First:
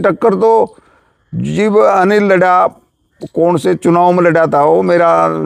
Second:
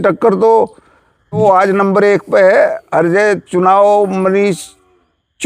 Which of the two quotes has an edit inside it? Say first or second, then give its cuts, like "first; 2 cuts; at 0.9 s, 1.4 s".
second; 1 cut; at 1.4 s